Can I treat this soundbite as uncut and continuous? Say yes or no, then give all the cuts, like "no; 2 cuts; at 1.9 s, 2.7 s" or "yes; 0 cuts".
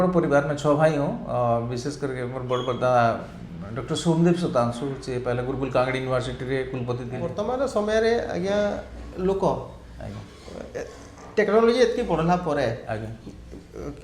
no; 1 cut; at 7.3 s